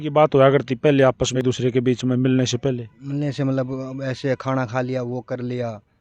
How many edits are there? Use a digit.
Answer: 1